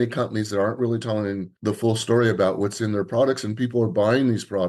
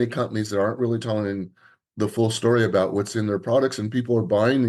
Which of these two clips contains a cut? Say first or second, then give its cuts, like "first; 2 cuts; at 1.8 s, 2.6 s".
first; 1 cut; at 1.5 s